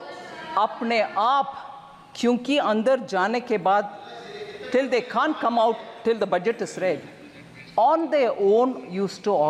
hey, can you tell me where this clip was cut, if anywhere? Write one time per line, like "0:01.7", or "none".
none